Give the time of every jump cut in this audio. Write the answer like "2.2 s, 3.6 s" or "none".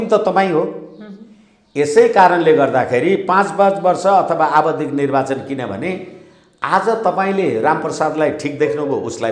none